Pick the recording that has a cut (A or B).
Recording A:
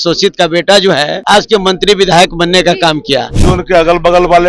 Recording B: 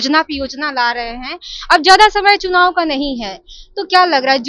A